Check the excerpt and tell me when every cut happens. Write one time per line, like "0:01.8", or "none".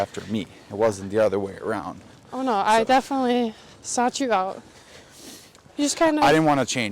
0:04.7